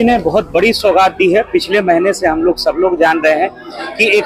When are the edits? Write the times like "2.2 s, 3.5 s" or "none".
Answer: none